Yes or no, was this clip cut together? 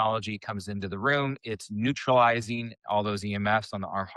no